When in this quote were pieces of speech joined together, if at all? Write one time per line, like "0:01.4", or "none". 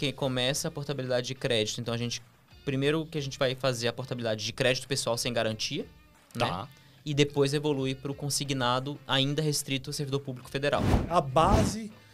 0:11.0